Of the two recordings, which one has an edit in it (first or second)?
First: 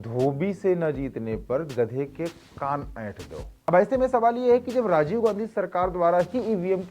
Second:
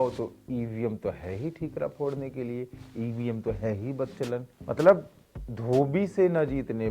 first